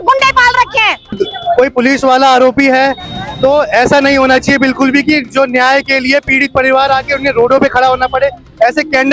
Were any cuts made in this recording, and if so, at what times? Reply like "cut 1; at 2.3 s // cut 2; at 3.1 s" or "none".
cut 1; at 1.1 s